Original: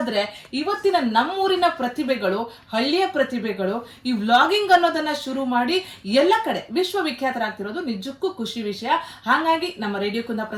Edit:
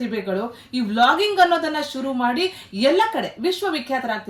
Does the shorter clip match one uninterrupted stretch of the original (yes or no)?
yes